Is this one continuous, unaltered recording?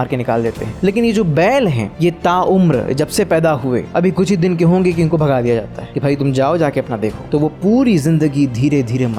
yes; 0 cuts

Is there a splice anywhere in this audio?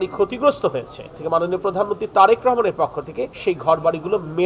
yes; 2 cuts; at 1.2 s, 3.2 s

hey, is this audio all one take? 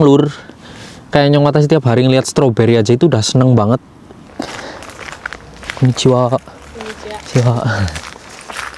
no; 1 cut; at 4.4 s

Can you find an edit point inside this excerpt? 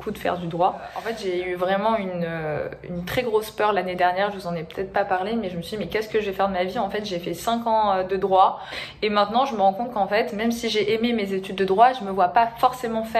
yes; 2 cuts; at 1.1 s, 8.8 s

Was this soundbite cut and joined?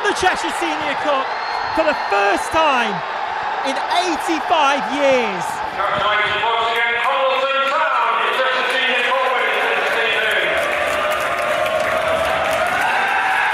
no; 0 cuts

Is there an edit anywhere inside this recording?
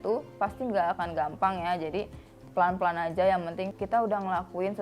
yes; 1 cut; at 3.7 s

